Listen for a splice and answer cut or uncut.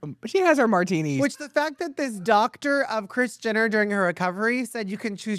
uncut